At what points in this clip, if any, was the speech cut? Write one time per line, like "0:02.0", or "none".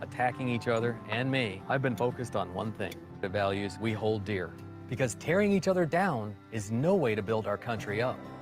0:03.2